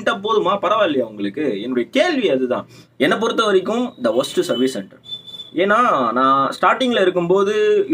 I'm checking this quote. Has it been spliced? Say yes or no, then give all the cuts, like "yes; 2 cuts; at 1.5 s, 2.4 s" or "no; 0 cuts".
yes; 1 cut; at 2.8 s